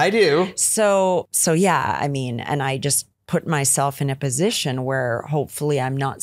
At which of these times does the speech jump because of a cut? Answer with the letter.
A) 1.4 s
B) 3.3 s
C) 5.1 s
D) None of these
D